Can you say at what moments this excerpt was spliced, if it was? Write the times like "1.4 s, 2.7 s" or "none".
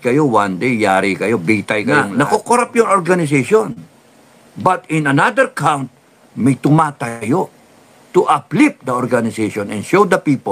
2.0 s